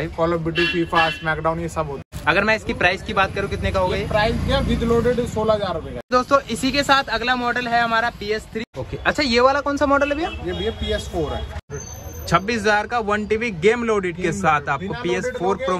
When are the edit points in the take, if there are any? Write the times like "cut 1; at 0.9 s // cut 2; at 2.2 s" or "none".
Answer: cut 1; at 2.1 s // cut 2; at 6.0 s // cut 3; at 8.7 s // cut 4; at 11.7 s